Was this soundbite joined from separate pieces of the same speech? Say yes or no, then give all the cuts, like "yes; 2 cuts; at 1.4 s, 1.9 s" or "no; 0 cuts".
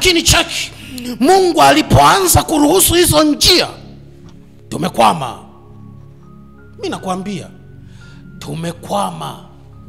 no; 0 cuts